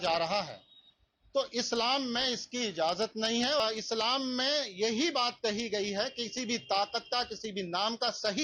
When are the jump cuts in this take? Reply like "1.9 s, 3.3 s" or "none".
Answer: 3.6 s